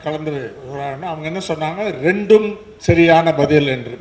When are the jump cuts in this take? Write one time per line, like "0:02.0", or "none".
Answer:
none